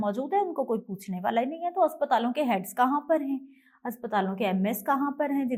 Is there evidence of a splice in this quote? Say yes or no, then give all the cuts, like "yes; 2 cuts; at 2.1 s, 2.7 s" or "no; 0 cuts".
no; 0 cuts